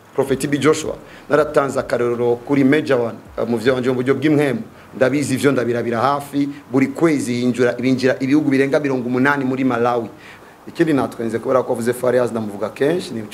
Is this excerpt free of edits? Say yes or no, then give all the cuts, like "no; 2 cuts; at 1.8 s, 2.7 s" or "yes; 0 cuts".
no; 1 cut; at 10.3 s